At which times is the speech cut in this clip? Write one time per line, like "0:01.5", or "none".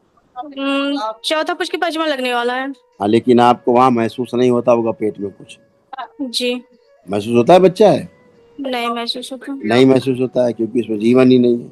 none